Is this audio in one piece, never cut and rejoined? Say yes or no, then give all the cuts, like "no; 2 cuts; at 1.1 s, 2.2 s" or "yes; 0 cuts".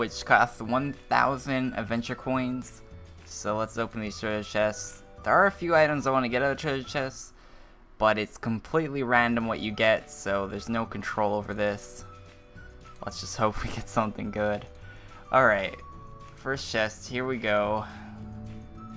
no; 1 cut; at 17.1 s